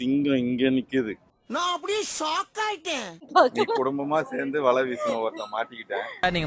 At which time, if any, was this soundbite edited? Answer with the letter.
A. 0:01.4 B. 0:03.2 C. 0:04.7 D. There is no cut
B